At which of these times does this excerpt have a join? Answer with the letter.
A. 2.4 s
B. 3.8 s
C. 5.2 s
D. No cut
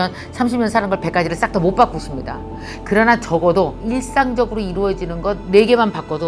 B